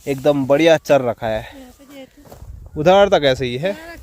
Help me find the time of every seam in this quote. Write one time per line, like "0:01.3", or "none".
none

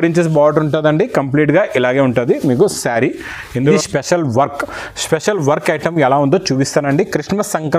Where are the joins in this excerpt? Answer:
0:03.7

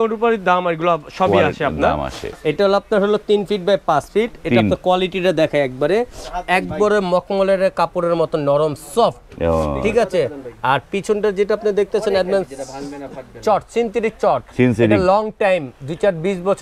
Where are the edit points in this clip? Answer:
0:02.3

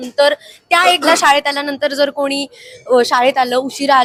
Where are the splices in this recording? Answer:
none

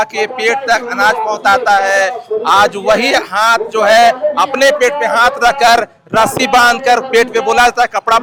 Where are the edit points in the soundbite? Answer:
none

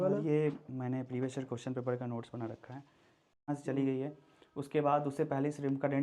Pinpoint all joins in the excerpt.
0:03.4

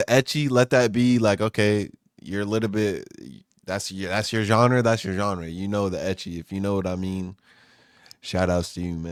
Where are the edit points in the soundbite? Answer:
none

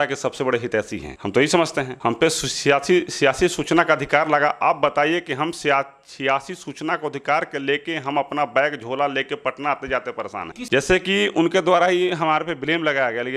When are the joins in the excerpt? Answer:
0:10.6

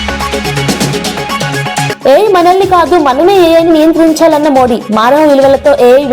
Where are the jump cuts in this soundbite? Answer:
0:01.9

